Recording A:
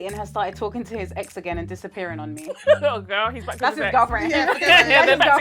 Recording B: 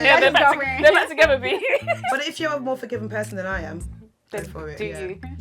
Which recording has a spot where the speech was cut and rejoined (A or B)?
B